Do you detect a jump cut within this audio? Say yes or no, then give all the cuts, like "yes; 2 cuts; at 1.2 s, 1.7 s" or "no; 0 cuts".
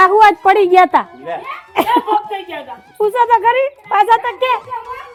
no; 0 cuts